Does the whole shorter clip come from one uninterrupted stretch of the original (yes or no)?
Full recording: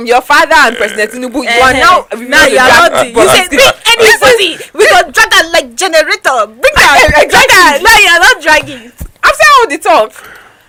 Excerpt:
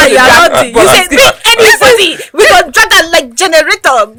yes